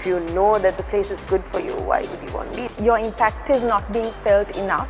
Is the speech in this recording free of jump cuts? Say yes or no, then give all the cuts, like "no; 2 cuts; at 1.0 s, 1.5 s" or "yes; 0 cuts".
no; 1 cut; at 2.6 s